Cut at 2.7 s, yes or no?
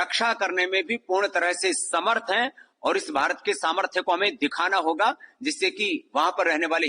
no